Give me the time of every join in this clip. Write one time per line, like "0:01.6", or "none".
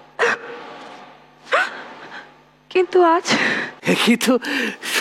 0:03.7